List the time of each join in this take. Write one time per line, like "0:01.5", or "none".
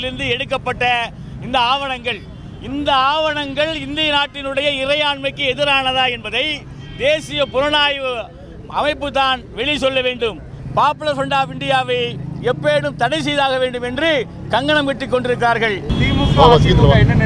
0:10.6
0:15.8